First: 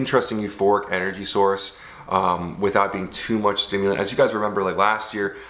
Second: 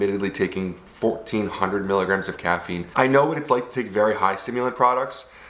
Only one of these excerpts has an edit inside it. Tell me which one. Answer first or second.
second